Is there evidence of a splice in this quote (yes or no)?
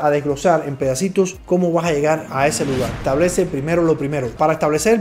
yes